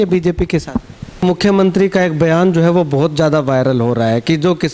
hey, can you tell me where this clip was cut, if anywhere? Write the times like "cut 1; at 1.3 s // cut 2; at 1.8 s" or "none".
cut 1; at 1.2 s